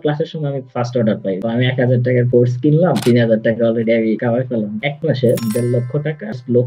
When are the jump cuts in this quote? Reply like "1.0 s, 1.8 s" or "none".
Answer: 1.4 s, 4.8 s